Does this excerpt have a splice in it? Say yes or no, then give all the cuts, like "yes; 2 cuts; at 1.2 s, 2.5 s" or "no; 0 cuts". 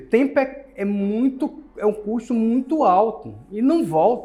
no; 0 cuts